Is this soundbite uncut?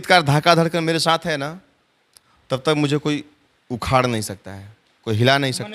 yes; 0 cuts

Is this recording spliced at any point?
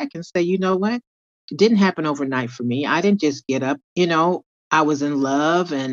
yes; 1 cut; at 3.8 s

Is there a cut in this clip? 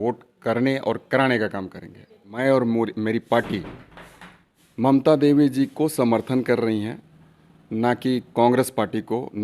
yes; 1 cut; at 2.2 s

